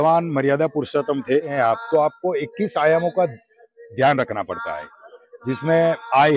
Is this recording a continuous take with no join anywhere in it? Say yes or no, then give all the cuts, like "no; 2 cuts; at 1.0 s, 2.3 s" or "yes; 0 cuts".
no; 1 cut; at 1.5 s